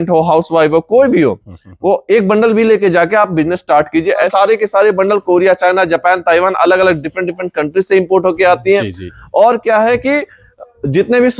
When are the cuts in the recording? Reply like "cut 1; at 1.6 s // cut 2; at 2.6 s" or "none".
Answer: cut 1; at 4.3 s